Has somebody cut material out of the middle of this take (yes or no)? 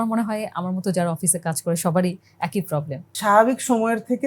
yes